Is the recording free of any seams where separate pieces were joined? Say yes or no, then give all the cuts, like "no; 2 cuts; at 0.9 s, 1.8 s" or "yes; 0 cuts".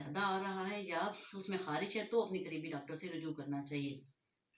yes; 0 cuts